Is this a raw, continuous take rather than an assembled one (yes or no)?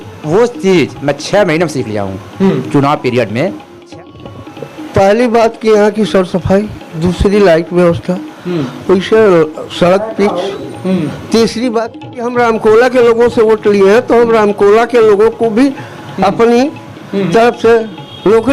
no